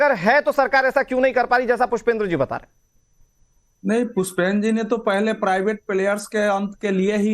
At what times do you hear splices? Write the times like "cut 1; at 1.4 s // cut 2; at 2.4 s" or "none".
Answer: cut 1; at 5.8 s